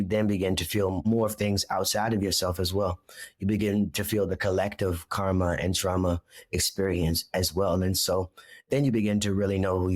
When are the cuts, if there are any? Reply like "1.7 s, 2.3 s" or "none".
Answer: 1.1 s